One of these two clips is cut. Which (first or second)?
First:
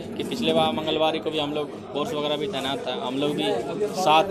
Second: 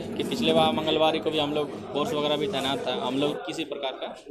second